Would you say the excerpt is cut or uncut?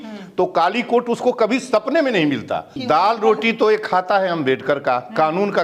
cut